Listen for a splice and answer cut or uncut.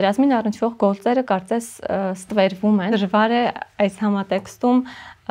cut